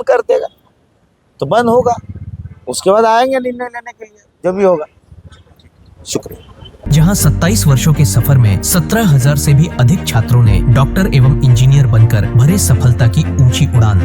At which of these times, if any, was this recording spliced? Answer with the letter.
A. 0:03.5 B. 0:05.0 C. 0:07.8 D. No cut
D